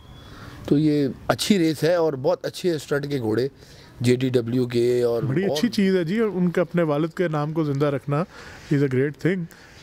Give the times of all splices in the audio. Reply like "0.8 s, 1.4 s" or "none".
5.3 s

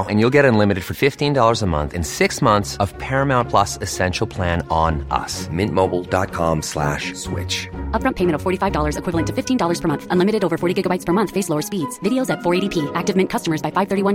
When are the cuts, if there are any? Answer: none

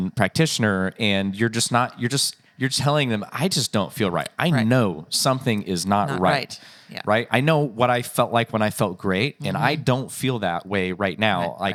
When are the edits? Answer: none

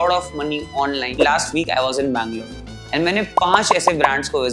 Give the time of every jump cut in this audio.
1.1 s

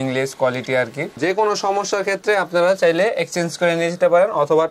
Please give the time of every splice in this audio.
1.2 s

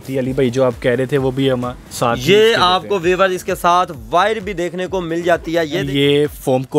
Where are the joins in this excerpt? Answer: 5.9 s

